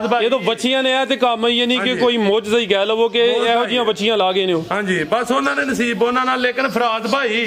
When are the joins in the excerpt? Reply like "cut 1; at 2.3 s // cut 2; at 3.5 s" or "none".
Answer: none